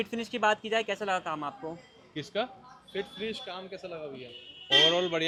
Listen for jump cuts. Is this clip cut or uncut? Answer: uncut